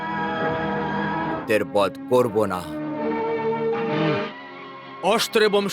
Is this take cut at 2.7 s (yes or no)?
no